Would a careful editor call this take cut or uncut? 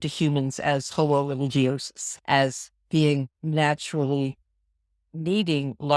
cut